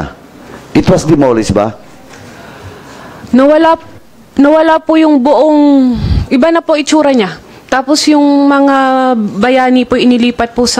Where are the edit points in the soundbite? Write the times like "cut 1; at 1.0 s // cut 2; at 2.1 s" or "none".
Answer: none